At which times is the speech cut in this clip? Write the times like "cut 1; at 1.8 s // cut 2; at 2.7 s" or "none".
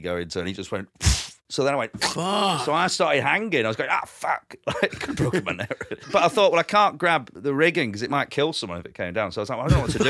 cut 1; at 6.0 s // cut 2; at 7.3 s // cut 3; at 8.3 s